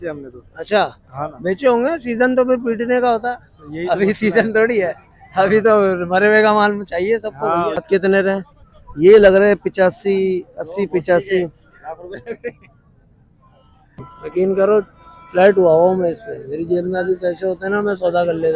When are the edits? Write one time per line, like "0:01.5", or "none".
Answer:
0:07.8
0:14.1